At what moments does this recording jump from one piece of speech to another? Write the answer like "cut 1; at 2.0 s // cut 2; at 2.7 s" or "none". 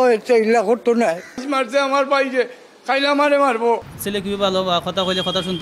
cut 1; at 1.4 s // cut 2; at 4.0 s